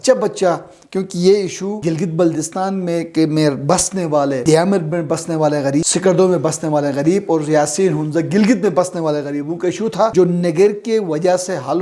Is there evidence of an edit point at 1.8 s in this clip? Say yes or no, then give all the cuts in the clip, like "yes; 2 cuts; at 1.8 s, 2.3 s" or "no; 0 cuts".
yes; 4 cuts; at 1.8 s, 4.4 s, 5.9 s, 10.1 s